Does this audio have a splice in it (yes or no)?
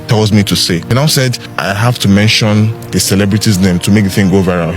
yes